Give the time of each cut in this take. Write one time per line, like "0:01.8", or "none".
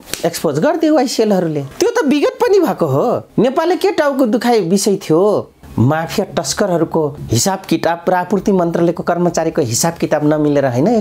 0:01.6
0:03.2
0:05.6
0:07.2